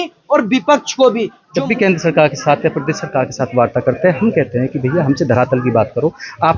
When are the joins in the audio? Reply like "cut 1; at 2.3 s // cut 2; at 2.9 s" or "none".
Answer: cut 1; at 1.4 s